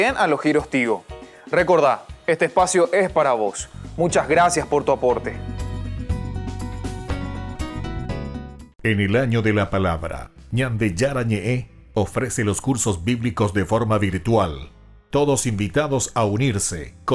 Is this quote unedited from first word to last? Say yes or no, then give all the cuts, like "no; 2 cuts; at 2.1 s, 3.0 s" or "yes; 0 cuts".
no; 1 cut; at 8.6 s